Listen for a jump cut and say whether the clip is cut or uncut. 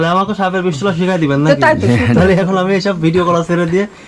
uncut